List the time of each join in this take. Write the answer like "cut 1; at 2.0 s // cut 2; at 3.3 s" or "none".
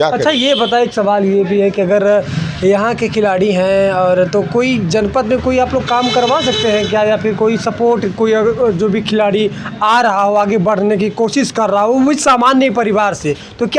none